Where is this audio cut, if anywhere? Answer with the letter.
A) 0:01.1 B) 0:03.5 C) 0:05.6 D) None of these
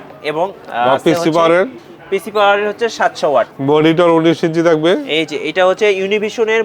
B